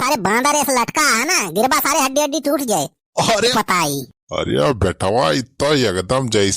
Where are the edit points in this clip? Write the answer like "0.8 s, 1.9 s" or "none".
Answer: 3.5 s